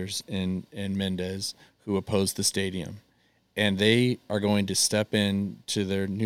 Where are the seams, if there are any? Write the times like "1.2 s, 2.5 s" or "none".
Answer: none